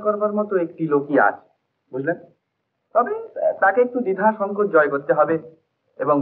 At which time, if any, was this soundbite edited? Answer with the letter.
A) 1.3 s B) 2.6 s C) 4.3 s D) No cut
D